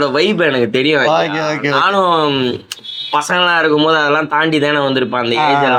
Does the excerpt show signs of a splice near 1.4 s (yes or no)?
no